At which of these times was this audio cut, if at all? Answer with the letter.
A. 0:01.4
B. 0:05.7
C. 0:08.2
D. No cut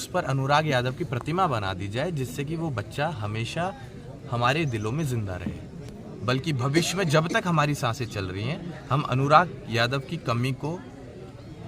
B